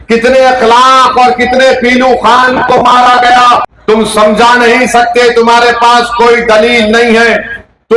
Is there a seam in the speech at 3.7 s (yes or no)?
yes